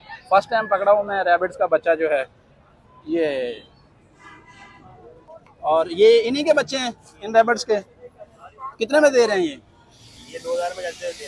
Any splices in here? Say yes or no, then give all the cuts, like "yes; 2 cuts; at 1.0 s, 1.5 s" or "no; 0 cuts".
yes; 1 cut; at 5.3 s